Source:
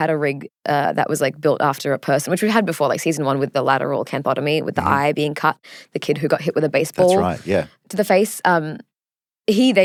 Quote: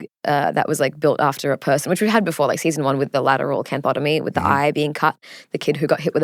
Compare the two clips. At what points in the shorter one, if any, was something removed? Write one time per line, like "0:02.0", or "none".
none